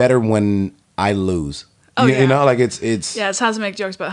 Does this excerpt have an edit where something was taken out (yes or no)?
yes